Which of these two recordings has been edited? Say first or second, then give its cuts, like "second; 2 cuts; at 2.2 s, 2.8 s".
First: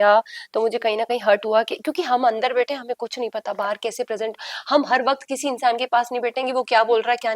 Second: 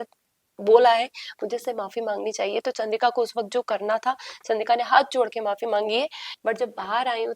second; 1 cut; at 6.2 s